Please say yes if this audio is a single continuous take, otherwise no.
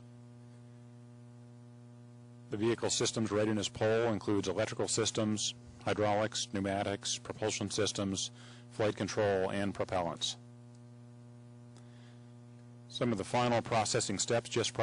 no